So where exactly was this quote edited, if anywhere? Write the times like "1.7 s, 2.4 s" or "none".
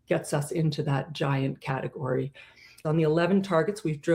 2.8 s